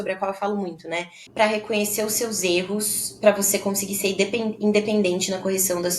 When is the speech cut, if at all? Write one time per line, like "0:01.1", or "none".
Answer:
0:01.2